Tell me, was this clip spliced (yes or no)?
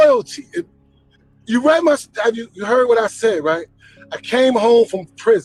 no